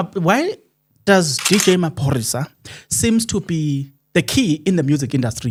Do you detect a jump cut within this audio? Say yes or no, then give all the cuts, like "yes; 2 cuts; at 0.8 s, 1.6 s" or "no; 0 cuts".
no; 0 cuts